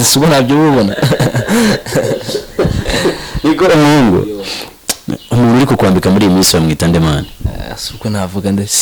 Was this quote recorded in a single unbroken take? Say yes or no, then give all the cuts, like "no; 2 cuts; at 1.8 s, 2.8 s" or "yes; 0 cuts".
yes; 0 cuts